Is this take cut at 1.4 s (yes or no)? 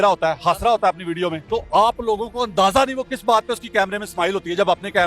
yes